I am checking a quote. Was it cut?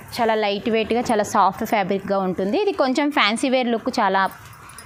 no; 0 cuts

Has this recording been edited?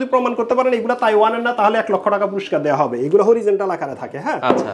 no; 0 cuts

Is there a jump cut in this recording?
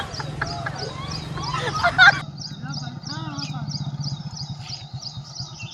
no; 0 cuts

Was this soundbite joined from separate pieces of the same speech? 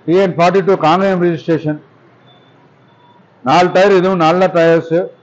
no; 0 cuts

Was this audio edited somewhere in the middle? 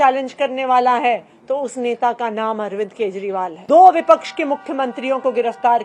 yes; 1 cut; at 3.6 s

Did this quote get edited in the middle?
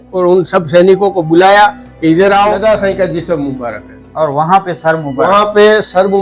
yes; 1 cut; at 2.6 s

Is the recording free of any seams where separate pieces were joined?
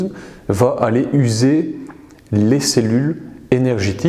yes; 0 cuts

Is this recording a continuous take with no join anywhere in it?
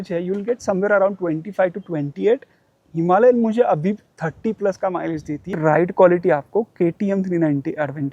no; 1 cut; at 5.5 s

